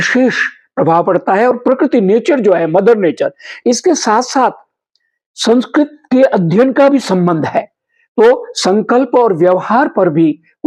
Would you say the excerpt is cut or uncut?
uncut